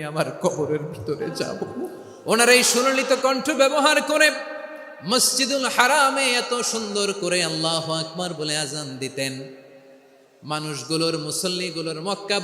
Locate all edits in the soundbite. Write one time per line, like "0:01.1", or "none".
0:02.1